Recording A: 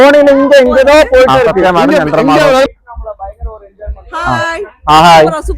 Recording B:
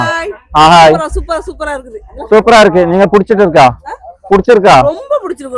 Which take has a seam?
A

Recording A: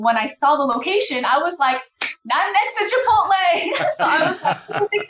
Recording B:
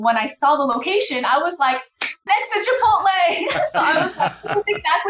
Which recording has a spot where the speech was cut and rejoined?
B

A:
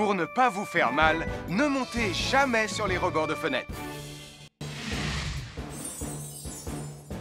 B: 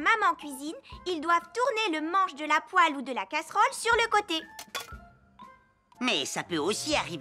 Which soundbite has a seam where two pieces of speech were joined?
A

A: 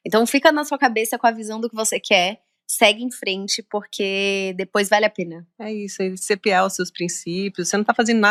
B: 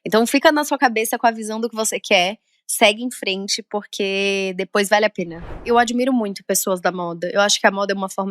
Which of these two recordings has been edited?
B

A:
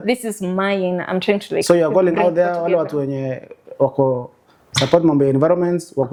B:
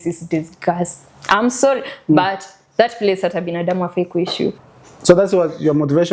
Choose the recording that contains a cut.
B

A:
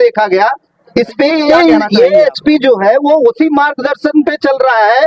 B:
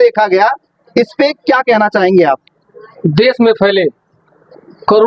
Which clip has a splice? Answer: A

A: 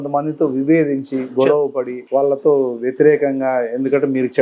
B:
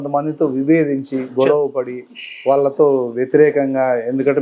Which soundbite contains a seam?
A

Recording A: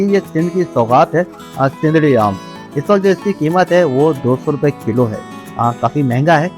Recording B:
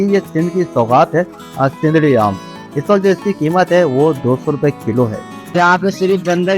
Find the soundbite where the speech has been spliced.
B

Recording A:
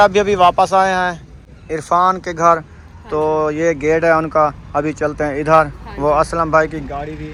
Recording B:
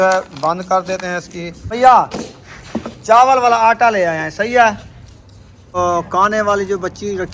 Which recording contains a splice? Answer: B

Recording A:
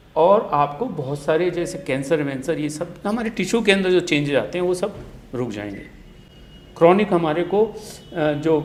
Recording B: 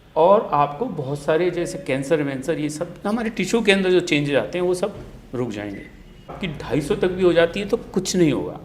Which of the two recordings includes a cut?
B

